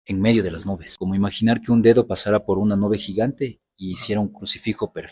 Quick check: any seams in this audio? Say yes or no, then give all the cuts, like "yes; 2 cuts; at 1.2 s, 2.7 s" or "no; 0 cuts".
yes; 1 cut; at 0.9 s